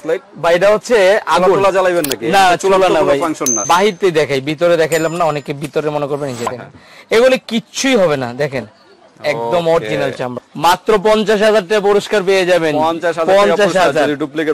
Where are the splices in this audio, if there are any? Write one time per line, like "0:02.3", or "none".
0:03.6
0:10.4